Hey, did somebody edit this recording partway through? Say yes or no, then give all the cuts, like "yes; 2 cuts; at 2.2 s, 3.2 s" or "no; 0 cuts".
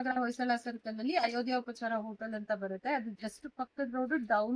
no; 0 cuts